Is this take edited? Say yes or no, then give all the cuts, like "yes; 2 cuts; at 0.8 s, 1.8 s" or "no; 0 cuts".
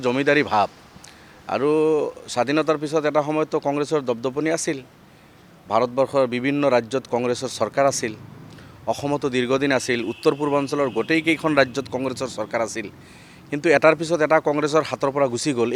no; 0 cuts